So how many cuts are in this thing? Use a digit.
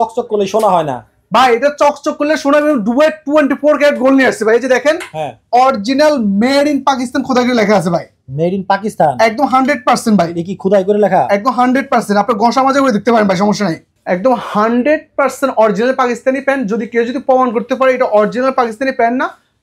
1